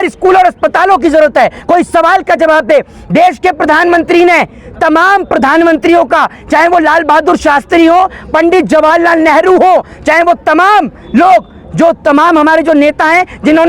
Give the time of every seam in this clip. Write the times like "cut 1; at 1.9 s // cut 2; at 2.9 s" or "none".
none

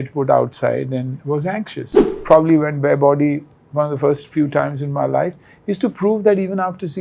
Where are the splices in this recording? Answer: cut 1; at 2.2 s

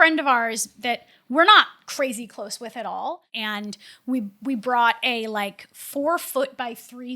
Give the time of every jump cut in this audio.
cut 1; at 3.3 s

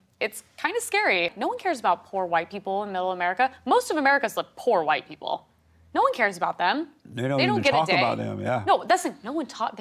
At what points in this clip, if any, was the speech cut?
cut 1; at 1.3 s

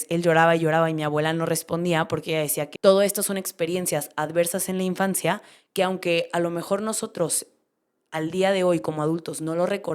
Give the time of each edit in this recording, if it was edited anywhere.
cut 1; at 2.6 s

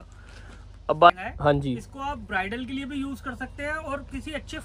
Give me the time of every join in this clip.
cut 1; at 1.1 s

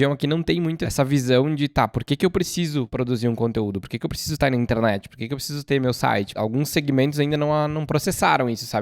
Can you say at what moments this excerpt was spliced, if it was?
cut 1; at 0.8 s // cut 2; at 2.9 s // cut 3; at 6.3 s

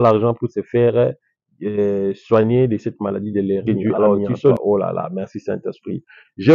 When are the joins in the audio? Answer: cut 1; at 4.6 s

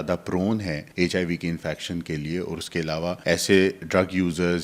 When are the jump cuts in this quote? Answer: cut 1; at 0.8 s // cut 2; at 3.2 s

